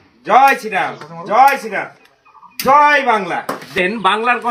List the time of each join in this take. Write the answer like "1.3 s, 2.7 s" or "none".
none